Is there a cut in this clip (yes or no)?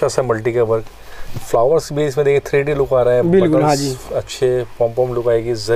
no